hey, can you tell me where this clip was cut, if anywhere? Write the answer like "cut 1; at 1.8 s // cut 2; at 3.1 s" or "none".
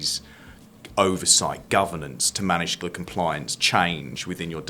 cut 1; at 2.8 s